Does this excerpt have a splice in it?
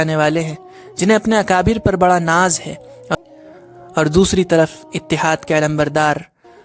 yes; 1 cut; at 3.1 s

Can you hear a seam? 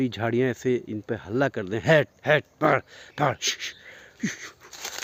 no; 0 cuts

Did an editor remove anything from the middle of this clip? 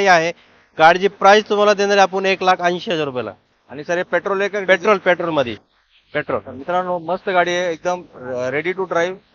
no; 0 cuts

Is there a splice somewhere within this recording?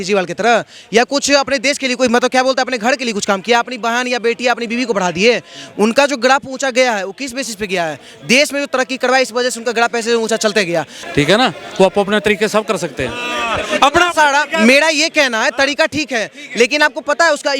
yes; 1 cut; at 11.0 s

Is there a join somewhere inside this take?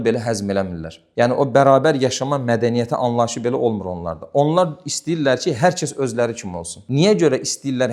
no; 0 cuts

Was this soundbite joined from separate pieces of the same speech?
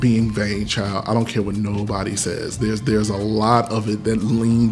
no; 0 cuts

